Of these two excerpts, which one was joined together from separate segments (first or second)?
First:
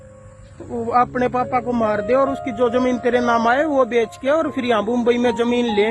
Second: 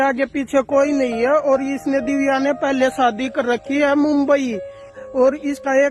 second